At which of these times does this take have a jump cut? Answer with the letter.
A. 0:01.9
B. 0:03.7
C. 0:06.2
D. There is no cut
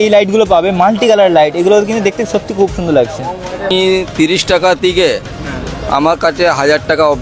B